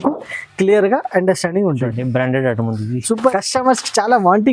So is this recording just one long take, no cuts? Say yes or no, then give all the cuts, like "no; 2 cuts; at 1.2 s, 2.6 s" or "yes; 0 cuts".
no; 1 cut; at 3.3 s